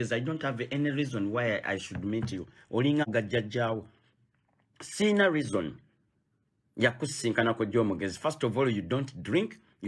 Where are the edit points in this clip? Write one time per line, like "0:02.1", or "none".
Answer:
0:03.1